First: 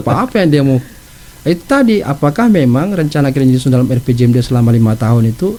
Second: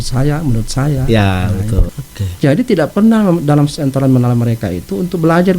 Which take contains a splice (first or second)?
second